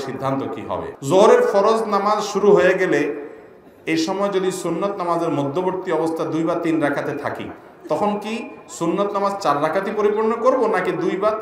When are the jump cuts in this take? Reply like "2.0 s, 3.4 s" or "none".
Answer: 0.9 s